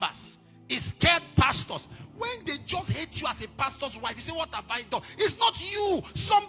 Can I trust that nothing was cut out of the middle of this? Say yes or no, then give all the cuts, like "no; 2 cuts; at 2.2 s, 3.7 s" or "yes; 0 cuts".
yes; 0 cuts